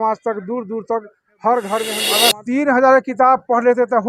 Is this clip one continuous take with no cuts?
no; 1 cut; at 2.0 s

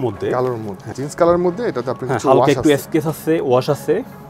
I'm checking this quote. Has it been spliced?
yes; 1 cut; at 0.9 s

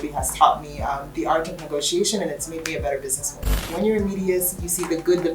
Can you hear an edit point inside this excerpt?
yes; 1 cut; at 3.6 s

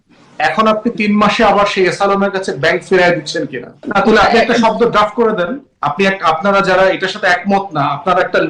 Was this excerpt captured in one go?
no; 1 cut; at 3.8 s

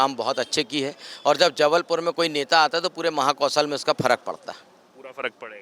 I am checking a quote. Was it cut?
no; 0 cuts

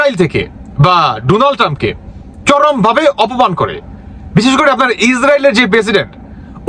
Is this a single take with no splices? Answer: yes; 0 cuts

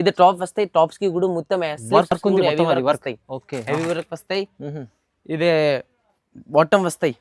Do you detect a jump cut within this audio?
no; 0 cuts

